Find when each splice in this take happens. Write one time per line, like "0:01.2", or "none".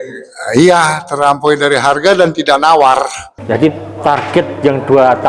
0:03.3